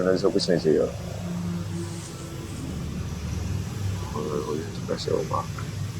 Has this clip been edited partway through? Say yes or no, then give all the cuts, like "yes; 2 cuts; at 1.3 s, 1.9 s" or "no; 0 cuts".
no; 0 cuts